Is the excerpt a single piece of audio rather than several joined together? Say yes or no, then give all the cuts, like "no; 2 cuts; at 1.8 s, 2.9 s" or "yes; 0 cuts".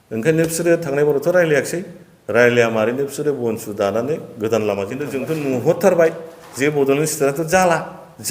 no; 1 cut; at 5.2 s